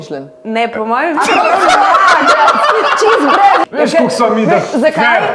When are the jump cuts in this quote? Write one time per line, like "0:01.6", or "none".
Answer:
0:03.6